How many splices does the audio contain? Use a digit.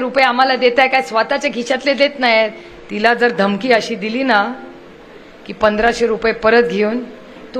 1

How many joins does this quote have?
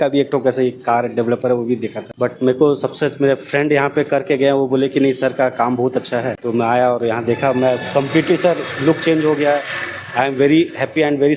2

